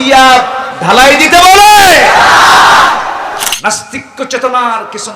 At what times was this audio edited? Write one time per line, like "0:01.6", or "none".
0:03.5